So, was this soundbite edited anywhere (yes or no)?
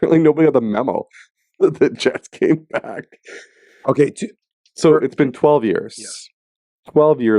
no